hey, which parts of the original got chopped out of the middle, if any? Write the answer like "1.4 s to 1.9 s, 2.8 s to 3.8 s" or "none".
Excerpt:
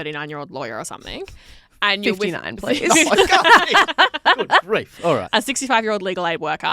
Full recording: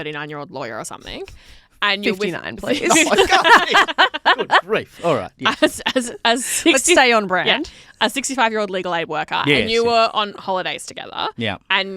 5.3 s to 7.9 s